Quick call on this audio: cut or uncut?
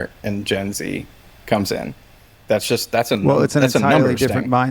uncut